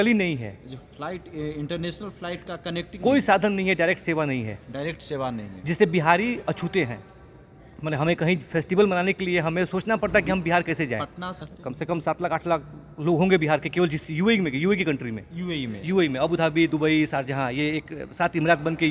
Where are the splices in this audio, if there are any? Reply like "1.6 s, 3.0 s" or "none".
11.5 s